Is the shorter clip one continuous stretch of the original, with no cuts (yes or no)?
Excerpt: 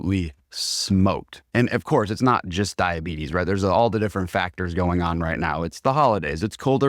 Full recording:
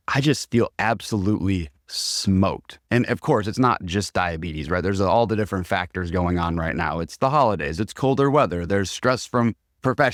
yes